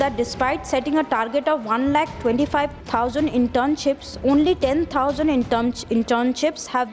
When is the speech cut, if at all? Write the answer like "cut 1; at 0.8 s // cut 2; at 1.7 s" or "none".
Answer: cut 1; at 2.8 s